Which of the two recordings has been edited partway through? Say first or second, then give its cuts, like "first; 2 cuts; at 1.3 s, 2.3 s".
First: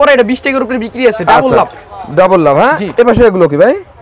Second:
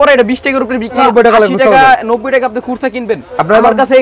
second; 1 cut; at 1.0 s